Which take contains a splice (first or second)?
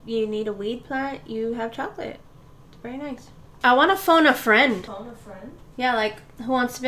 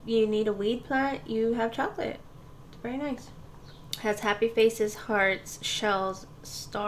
first